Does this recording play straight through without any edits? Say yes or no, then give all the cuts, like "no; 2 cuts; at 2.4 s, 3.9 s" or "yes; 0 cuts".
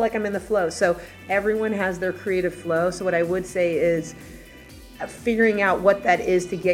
no; 1 cut; at 1.2 s